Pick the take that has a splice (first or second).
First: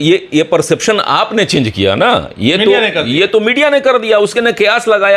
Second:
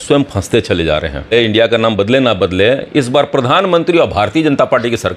second